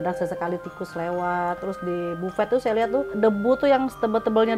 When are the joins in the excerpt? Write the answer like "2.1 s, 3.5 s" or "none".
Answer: 1.6 s, 3.1 s